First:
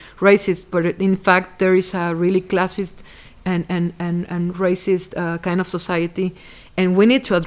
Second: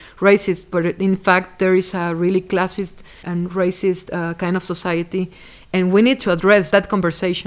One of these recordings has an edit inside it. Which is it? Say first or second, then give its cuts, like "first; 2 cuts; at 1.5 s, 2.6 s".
second; 2 cuts; at 3.2 s, 6.7 s